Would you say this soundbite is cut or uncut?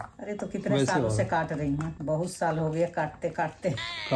uncut